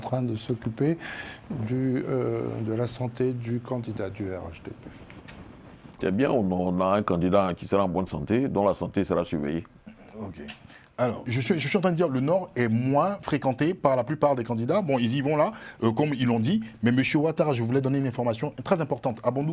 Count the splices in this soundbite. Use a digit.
1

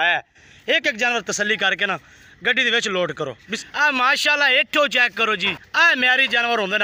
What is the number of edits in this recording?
1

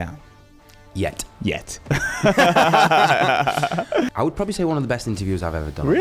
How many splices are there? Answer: 1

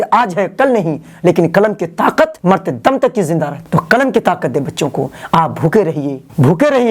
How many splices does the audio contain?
0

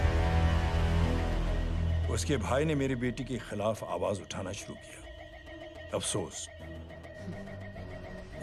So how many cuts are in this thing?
0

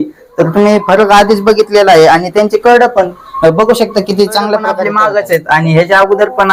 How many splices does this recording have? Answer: 1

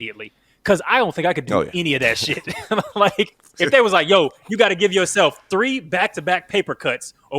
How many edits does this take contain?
1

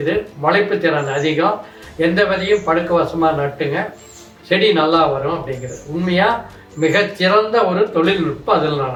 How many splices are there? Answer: 0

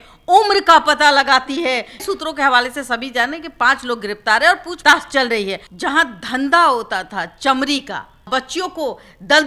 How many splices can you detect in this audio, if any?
3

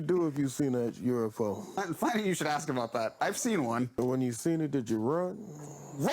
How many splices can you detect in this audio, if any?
2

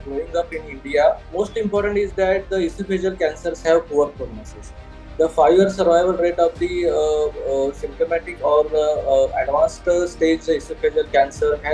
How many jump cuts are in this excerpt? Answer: 1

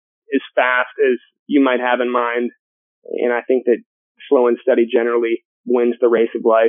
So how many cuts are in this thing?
1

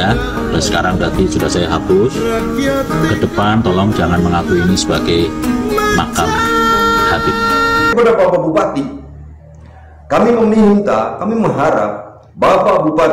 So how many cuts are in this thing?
1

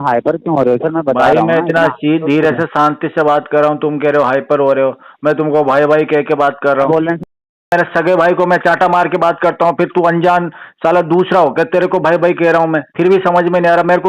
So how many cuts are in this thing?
0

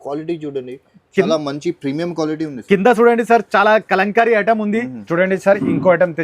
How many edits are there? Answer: 1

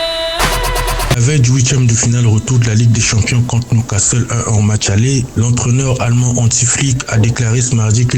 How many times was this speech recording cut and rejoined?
1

